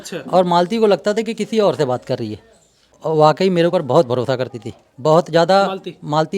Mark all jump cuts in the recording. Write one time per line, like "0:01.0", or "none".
0:02.9